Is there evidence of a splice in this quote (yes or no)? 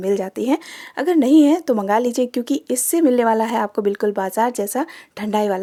no